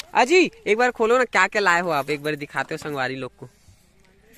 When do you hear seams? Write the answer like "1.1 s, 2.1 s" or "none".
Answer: none